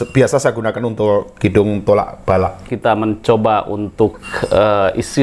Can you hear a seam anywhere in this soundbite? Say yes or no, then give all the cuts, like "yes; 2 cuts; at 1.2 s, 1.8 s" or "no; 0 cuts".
yes; 1 cut; at 2.6 s